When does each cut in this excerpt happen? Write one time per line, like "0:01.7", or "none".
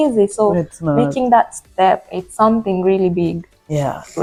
none